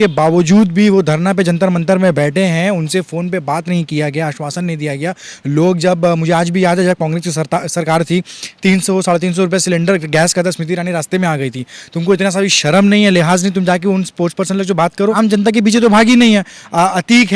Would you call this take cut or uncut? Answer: cut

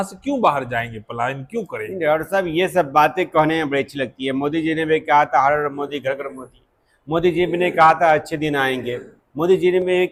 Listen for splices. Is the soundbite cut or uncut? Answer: uncut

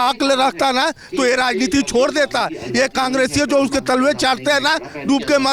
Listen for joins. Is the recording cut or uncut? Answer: uncut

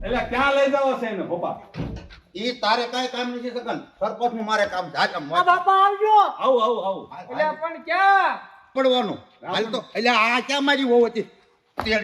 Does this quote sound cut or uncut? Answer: cut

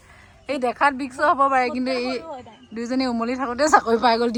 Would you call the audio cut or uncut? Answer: uncut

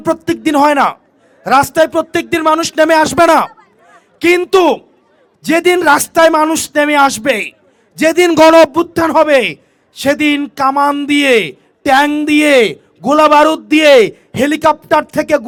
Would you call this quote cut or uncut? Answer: uncut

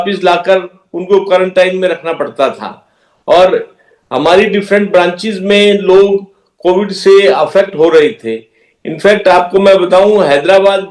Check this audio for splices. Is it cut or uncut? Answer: uncut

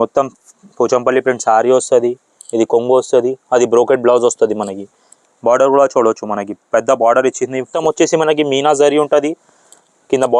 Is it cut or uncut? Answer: cut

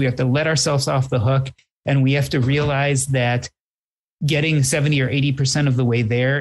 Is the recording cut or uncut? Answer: uncut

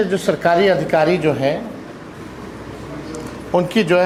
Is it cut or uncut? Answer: uncut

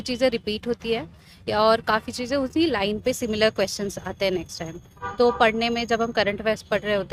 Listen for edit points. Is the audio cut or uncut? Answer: uncut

